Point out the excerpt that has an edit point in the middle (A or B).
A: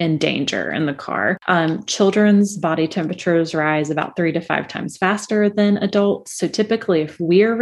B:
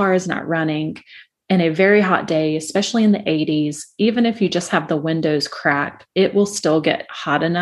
A